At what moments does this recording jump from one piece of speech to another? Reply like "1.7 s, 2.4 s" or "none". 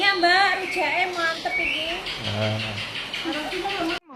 3.1 s